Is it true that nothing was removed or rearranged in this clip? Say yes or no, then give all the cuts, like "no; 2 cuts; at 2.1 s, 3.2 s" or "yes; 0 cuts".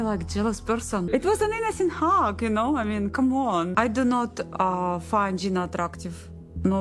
no; 2 cuts; at 1.1 s, 3.7 s